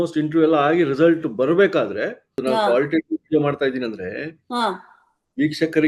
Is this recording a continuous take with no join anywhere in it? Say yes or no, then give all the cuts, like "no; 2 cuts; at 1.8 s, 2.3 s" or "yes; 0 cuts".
no; 1 cut; at 2.3 s